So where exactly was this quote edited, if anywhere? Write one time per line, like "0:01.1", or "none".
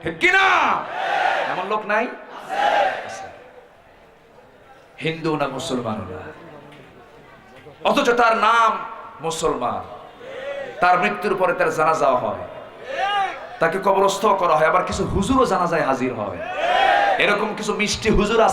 none